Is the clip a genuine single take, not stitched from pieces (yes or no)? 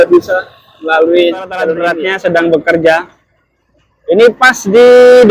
no